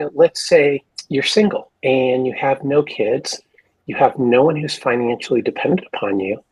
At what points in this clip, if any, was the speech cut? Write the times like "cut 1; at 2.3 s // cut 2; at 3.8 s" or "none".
cut 1; at 0.9 s // cut 2; at 1.7 s